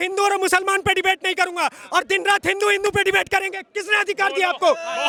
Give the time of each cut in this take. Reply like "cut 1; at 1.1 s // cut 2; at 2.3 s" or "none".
none